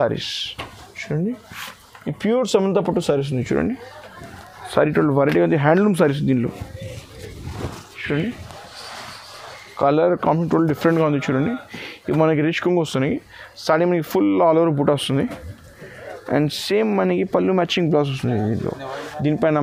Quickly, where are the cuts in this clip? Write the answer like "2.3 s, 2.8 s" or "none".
none